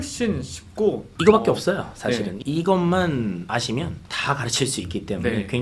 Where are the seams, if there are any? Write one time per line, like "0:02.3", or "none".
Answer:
0:04.0

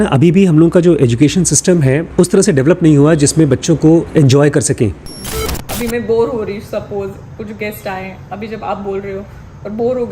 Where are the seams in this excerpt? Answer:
0:02.0
0:04.1
0:05.5

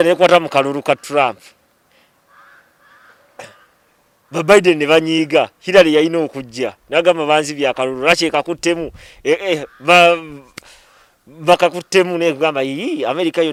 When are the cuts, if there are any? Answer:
none

